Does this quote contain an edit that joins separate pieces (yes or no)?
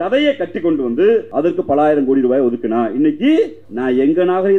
yes